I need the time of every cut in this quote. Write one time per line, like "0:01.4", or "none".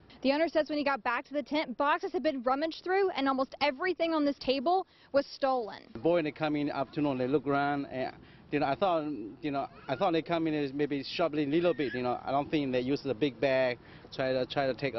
none